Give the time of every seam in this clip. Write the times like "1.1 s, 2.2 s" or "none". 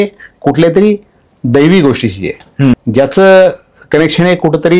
2.7 s